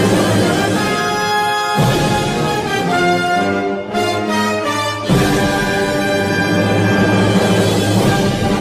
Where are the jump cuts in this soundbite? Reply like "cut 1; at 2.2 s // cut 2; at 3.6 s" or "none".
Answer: none